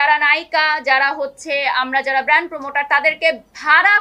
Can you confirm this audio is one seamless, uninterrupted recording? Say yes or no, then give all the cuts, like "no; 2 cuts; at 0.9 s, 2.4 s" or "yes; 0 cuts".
yes; 0 cuts